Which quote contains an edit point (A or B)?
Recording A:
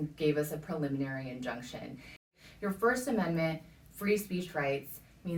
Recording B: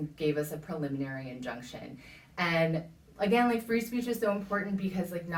A